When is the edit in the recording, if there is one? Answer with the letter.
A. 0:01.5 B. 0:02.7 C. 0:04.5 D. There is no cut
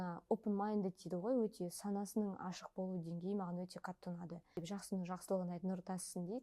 C